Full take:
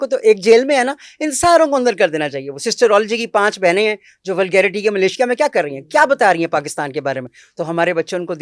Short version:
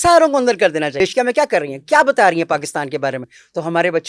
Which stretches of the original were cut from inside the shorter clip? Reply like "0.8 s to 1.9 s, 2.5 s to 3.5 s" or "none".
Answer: 2.3 s to 5.0 s